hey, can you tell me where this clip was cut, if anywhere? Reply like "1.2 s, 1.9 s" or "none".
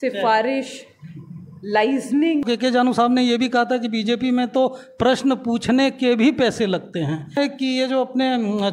2.4 s, 7.4 s